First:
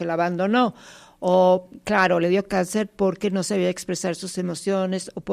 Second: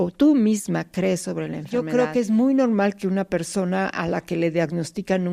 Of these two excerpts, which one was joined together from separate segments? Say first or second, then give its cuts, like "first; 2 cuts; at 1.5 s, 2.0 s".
second; 1 cut; at 1.9 s